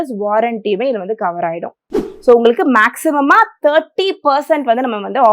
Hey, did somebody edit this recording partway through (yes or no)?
yes